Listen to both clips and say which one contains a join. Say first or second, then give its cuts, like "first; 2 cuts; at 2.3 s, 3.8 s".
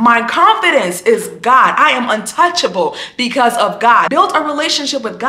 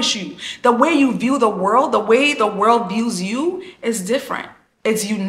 first; 1 cut; at 4.1 s